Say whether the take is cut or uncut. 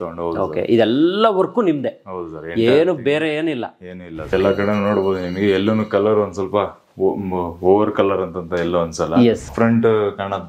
cut